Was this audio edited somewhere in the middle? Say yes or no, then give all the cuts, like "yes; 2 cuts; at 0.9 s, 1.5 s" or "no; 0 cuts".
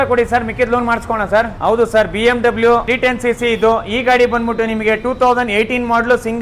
yes; 2 cuts; at 1.5 s, 2.9 s